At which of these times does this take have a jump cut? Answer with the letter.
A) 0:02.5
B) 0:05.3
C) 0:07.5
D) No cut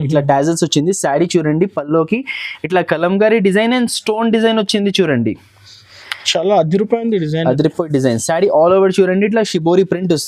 D